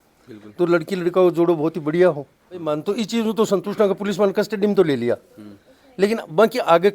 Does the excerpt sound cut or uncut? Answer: cut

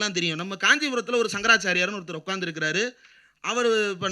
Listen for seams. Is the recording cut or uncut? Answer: uncut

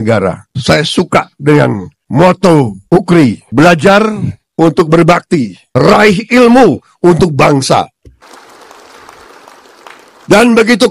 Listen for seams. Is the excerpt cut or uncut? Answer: uncut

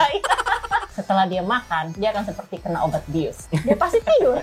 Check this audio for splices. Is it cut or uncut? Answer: cut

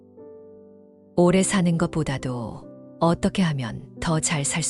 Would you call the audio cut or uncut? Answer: uncut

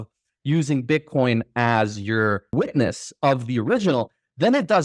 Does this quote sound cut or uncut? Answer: cut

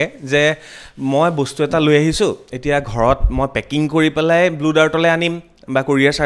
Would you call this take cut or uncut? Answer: uncut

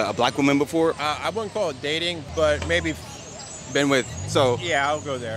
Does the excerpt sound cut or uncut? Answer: uncut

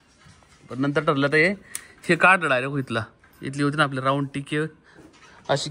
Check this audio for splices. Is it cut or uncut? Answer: uncut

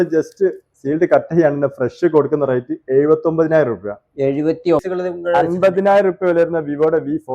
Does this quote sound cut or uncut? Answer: cut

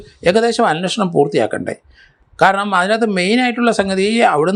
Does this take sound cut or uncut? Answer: uncut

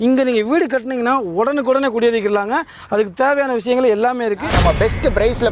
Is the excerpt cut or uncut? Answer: cut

